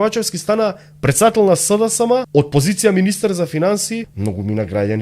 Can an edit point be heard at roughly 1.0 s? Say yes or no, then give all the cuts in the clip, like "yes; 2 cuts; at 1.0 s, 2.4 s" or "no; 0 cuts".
no; 2 cuts; at 2.3 s, 4.1 s